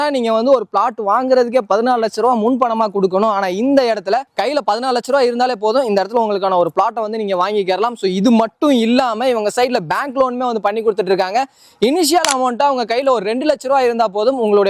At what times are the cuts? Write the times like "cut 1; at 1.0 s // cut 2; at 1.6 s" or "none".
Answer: none

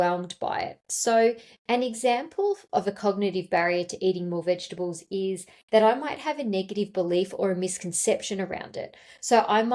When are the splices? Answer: none

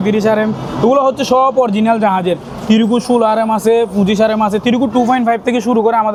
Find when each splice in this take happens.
none

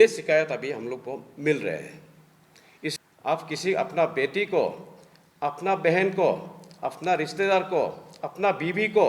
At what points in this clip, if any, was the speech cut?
cut 1; at 3.0 s

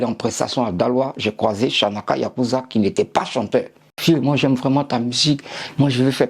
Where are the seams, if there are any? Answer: cut 1; at 3.9 s

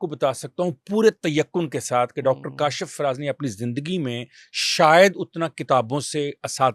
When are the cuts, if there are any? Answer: none

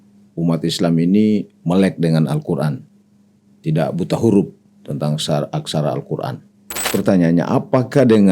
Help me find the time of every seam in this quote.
cut 1; at 6.9 s

